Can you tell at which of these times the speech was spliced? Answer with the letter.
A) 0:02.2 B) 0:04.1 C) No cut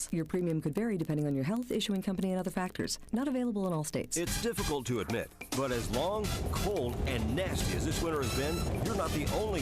B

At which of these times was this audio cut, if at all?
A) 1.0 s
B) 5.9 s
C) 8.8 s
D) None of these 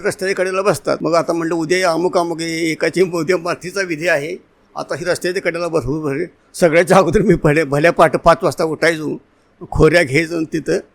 A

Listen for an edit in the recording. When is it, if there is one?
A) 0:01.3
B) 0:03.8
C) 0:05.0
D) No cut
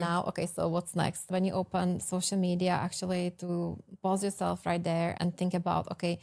A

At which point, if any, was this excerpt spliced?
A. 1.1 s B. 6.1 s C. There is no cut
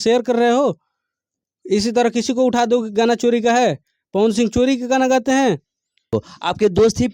B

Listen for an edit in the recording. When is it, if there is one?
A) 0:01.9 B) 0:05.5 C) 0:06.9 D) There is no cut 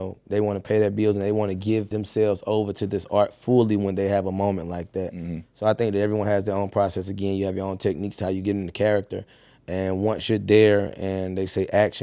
A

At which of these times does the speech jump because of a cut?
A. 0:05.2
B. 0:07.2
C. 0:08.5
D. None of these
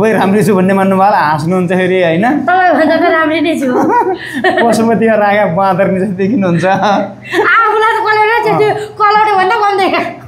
D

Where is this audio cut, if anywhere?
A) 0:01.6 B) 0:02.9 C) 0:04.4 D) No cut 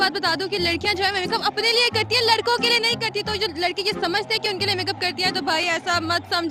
D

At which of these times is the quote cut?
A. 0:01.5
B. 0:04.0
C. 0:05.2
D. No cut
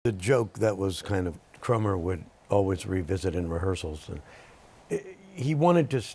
A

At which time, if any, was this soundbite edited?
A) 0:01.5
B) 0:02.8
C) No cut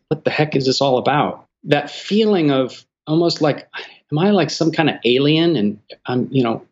A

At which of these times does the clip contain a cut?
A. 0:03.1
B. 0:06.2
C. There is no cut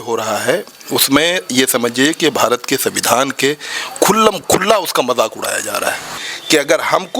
B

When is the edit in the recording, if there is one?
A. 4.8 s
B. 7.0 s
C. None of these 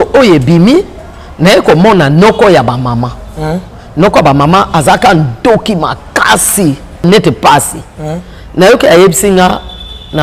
B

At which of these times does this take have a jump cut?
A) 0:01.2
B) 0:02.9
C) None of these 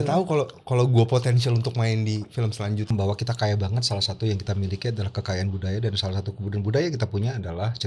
B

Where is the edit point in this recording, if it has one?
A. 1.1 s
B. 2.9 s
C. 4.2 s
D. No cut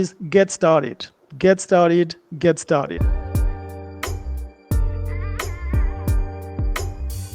B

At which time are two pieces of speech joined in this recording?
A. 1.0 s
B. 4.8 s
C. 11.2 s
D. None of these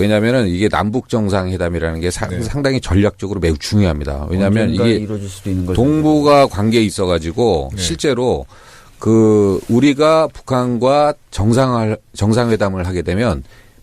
B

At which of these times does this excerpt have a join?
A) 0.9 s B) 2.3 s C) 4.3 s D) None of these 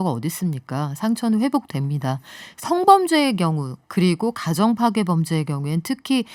D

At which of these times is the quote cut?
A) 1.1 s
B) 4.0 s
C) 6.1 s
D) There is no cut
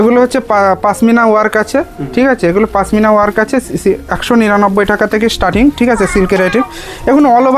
D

